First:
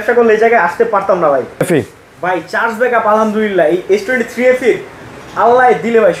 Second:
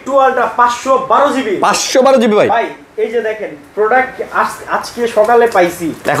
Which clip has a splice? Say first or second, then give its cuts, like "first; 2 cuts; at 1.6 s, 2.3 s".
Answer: first; 1 cut; at 1.6 s